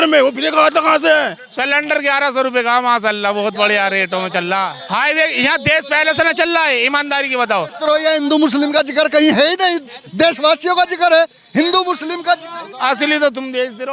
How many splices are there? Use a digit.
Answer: 3